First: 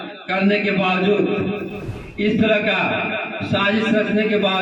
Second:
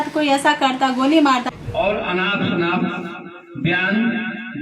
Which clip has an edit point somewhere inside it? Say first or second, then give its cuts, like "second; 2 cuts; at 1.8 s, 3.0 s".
second; 1 cut; at 1.5 s